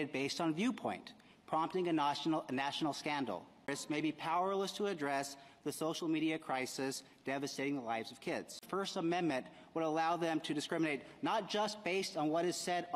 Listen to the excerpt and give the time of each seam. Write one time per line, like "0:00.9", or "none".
none